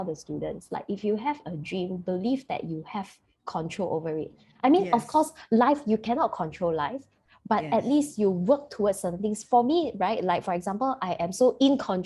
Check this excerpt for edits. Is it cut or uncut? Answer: uncut